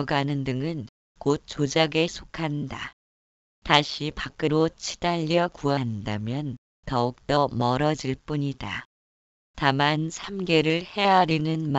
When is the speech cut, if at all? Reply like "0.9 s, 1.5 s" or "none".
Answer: 9.4 s, 10.2 s